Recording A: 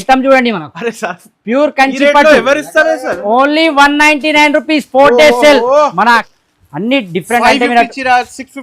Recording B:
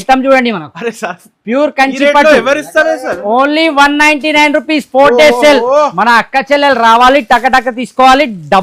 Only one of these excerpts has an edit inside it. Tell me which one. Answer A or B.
A